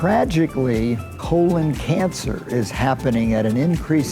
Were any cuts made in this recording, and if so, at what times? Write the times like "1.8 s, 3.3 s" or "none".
1.1 s